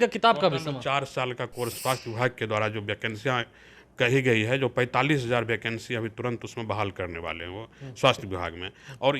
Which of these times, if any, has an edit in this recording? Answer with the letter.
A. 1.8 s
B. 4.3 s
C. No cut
A